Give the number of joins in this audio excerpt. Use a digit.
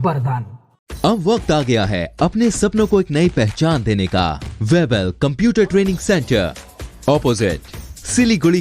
1